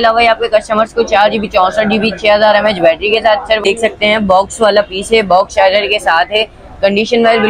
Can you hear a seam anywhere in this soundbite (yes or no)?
yes